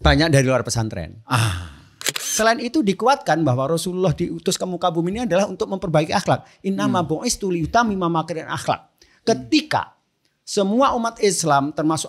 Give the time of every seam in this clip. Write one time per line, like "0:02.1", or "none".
0:02.3